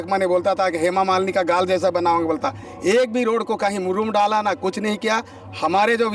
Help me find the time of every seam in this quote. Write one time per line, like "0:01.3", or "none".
none